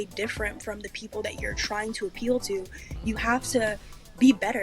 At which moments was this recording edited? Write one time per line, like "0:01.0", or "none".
none